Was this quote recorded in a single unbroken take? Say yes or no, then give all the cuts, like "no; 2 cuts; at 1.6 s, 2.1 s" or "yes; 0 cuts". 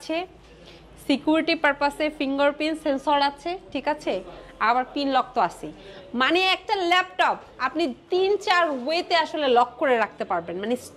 yes; 0 cuts